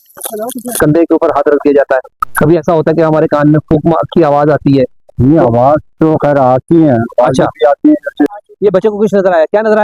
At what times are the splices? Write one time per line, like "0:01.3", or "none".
0:00.8
0:08.3